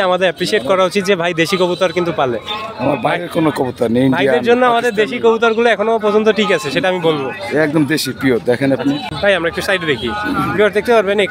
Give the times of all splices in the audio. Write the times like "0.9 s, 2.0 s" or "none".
none